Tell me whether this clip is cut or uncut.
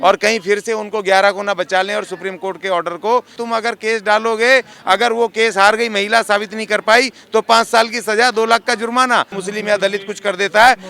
cut